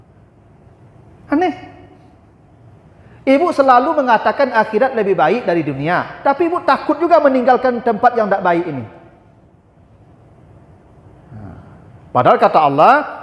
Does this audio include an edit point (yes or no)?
no